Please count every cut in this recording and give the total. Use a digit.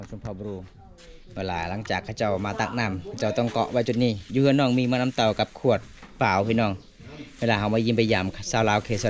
0